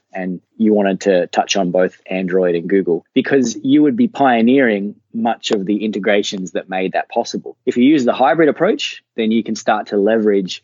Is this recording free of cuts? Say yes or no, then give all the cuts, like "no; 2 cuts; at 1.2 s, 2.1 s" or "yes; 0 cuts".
no; 1 cut; at 7.6 s